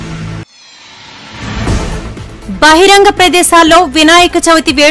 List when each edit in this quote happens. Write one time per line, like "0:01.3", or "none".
0:02.0